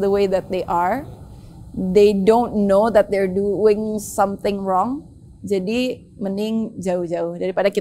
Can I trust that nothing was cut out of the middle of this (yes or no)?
yes